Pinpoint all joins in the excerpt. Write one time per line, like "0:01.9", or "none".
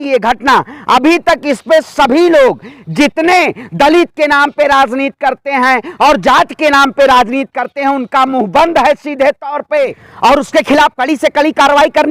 0:10.0